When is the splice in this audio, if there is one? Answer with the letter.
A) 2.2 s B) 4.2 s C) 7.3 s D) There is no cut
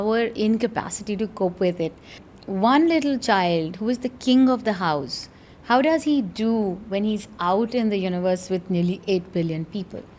A